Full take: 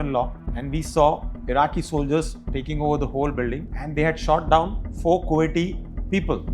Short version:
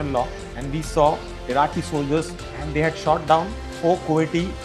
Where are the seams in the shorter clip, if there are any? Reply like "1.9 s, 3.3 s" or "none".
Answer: 2.5 s